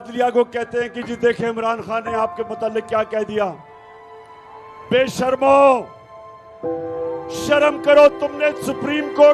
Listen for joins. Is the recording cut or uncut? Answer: cut